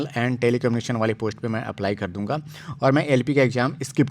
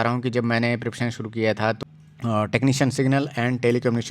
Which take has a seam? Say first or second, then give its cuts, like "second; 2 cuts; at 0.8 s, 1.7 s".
second; 1 cut; at 1.8 s